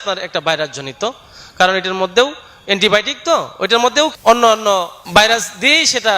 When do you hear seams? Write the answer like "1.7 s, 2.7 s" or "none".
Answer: 4.2 s, 5.0 s